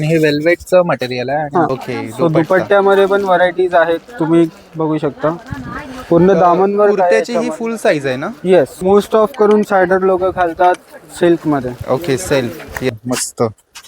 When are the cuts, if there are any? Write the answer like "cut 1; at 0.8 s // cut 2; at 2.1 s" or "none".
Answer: cut 1; at 1.8 s // cut 2; at 8.7 s // cut 3; at 12.9 s